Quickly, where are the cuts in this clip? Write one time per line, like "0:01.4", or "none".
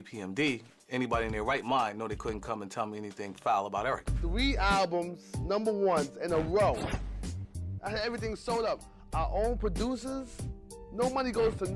0:01.4